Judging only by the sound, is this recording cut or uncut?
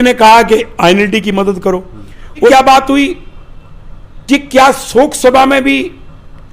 cut